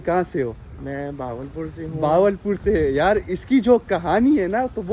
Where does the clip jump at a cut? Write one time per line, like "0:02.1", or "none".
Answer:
none